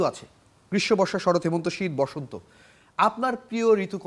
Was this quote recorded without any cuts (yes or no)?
yes